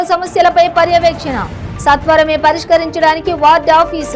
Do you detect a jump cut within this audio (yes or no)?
no